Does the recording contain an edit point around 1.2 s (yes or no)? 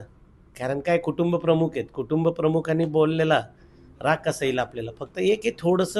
no